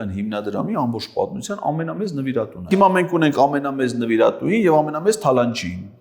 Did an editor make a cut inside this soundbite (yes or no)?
yes